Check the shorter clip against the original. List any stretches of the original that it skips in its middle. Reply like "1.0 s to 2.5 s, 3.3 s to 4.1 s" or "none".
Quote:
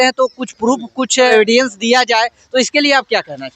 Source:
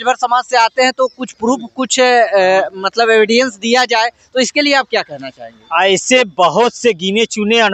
2.1 s to 3.1 s